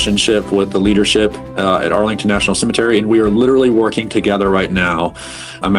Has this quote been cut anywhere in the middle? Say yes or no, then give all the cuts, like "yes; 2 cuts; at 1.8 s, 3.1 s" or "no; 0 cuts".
no; 0 cuts